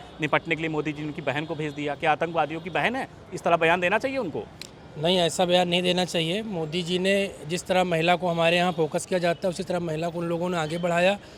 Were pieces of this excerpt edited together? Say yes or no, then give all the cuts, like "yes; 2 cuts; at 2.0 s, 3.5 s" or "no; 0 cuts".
no; 0 cuts